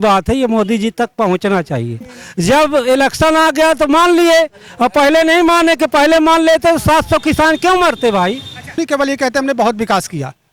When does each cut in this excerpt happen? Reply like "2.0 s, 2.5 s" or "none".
2.2 s, 8.8 s